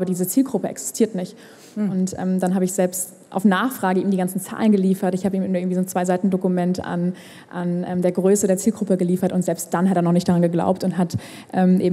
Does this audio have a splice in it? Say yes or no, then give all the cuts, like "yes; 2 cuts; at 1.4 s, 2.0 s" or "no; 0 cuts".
no; 0 cuts